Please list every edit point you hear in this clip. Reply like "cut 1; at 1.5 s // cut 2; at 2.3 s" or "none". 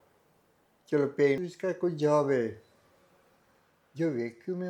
cut 1; at 1.4 s